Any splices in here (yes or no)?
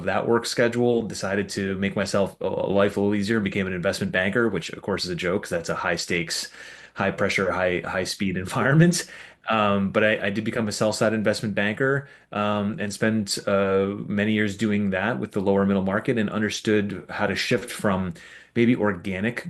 no